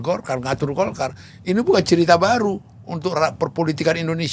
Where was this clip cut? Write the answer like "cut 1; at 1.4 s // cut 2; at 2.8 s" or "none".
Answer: none